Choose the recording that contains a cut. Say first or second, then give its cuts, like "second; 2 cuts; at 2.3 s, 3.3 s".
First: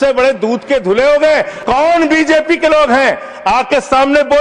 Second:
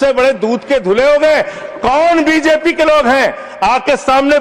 first; 1 cut; at 1.5 s